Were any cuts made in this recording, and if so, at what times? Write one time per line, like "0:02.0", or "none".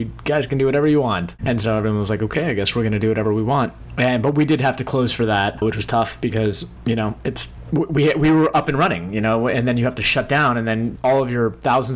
0:01.3
0:03.8
0:05.5
0:06.7
0:07.5
0:10.9